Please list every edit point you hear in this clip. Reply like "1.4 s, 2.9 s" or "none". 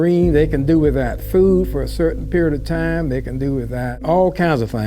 3.9 s